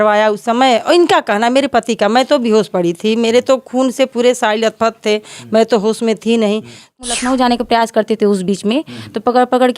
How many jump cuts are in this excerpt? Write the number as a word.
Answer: one